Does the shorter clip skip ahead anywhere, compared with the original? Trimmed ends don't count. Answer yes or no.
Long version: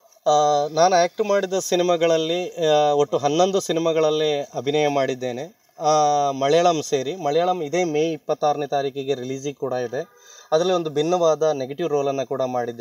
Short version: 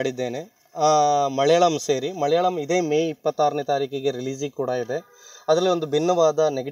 no